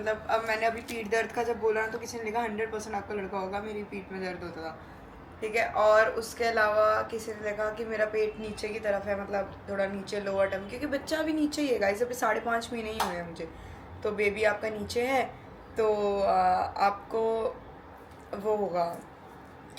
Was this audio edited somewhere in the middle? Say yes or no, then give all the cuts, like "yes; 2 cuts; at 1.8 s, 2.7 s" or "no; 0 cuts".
no; 0 cuts